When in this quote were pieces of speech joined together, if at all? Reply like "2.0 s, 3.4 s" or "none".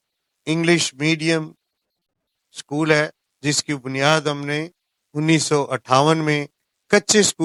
none

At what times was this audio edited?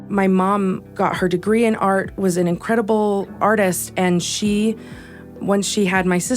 0.9 s, 3.4 s, 5.4 s

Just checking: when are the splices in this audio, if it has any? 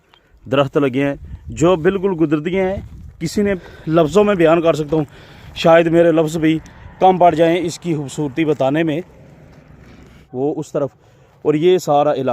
3.6 s, 10.2 s

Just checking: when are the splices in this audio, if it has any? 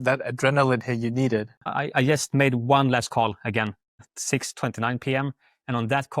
1.6 s

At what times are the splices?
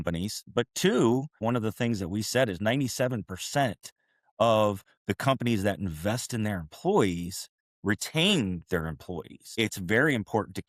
1.3 s, 9.5 s

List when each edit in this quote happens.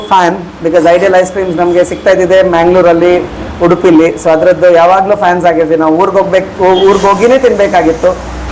none

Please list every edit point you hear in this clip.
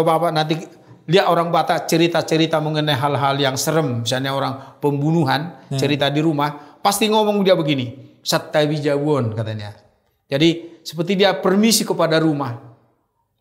none

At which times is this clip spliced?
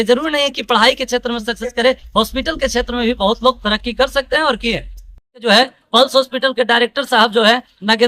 5.4 s

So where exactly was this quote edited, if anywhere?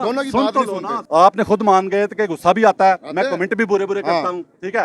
1.0 s

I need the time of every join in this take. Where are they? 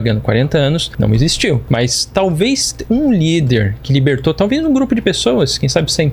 1.6 s

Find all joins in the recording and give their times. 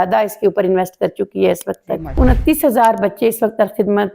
2.2 s

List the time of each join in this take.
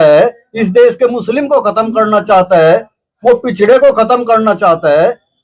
none

